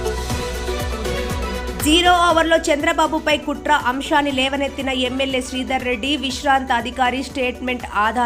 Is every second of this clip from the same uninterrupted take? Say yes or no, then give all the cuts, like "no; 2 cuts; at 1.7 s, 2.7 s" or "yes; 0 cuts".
no; 2 cuts; at 0.8 s, 1.7 s